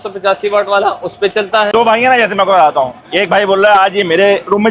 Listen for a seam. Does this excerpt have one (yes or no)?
yes